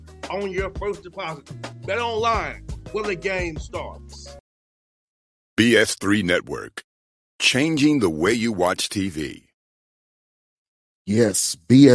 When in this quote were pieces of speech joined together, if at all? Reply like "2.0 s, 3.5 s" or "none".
4.3 s